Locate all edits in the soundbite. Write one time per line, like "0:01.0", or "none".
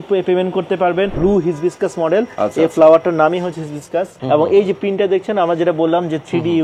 0:01.1
0:04.1